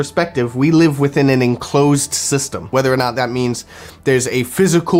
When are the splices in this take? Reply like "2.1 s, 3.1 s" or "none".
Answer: none